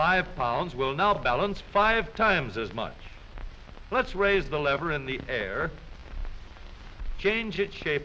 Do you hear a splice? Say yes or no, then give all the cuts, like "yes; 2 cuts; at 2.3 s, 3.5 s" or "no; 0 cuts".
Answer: yes; 1 cut; at 6.3 s